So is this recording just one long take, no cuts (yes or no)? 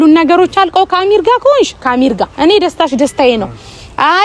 yes